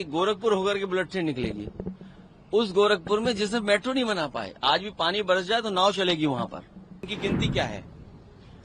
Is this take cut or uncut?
cut